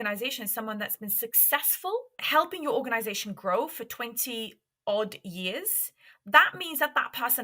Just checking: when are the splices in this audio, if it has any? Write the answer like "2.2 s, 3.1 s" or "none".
2.2 s